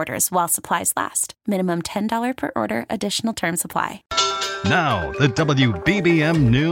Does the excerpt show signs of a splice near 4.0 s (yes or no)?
yes